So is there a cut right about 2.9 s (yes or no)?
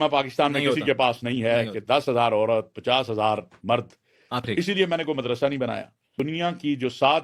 no